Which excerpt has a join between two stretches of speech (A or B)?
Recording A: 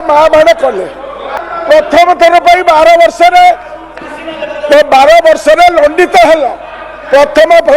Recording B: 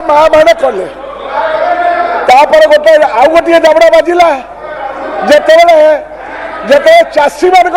A